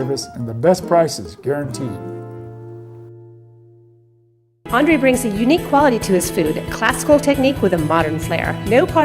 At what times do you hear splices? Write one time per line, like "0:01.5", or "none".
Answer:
0:04.5